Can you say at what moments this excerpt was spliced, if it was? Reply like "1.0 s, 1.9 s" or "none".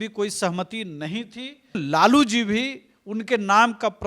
1.8 s